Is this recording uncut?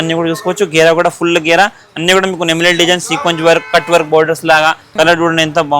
no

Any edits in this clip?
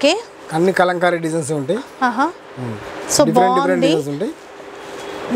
no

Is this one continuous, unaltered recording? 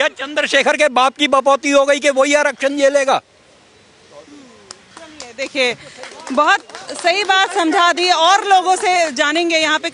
yes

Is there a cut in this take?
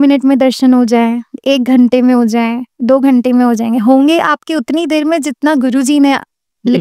no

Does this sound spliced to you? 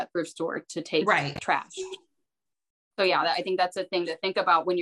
no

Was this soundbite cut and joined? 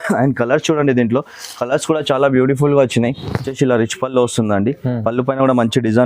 yes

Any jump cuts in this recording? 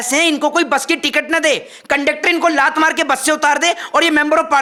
no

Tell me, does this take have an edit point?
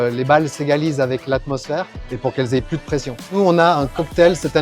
yes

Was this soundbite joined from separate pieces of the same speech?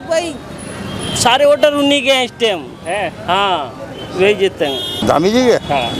yes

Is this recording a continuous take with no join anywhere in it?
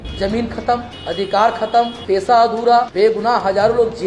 no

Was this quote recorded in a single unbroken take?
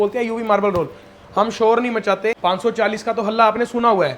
no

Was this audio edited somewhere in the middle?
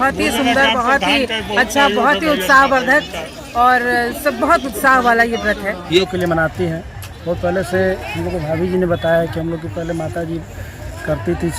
yes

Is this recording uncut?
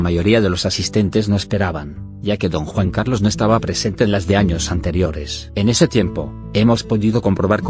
no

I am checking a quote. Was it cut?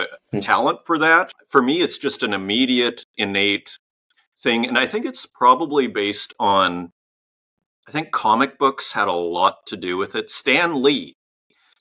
yes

